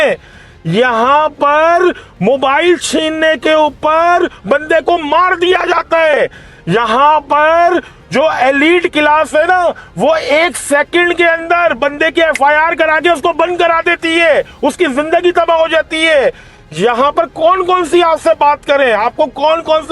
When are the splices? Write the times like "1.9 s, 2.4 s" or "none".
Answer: none